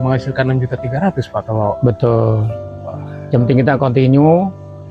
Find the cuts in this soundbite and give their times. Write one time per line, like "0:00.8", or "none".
none